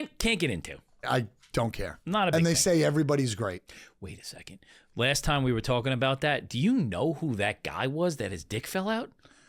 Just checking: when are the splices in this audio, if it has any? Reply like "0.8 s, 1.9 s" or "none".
1.1 s